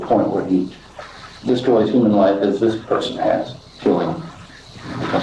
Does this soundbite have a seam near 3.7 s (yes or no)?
yes